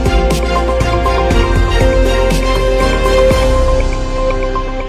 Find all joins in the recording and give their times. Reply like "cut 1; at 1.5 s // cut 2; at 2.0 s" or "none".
none